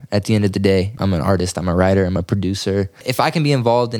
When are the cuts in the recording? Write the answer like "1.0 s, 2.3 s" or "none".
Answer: 0.9 s, 3.1 s